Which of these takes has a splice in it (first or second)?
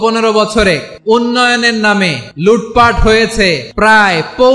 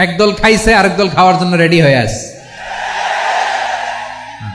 first